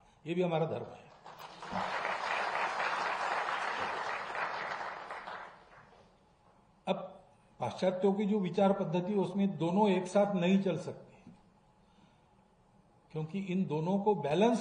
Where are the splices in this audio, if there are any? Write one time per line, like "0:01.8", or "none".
none